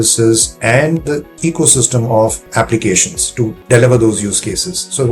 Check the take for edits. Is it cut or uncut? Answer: cut